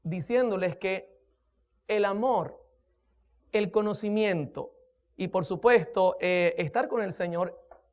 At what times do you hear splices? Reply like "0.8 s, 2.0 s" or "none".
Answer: 4.2 s